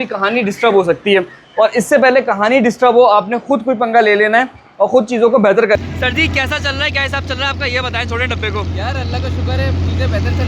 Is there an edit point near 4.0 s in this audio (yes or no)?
no